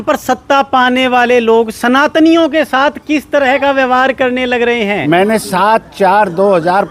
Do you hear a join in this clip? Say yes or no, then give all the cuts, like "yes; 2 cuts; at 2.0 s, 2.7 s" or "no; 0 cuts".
yes; 1 cut; at 5.0 s